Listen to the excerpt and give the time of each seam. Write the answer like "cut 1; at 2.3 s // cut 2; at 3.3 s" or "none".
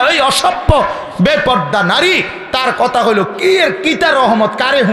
none